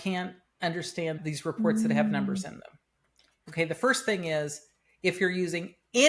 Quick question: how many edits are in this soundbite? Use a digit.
1